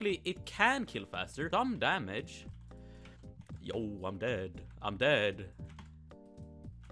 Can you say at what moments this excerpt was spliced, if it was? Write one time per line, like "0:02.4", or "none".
0:01.5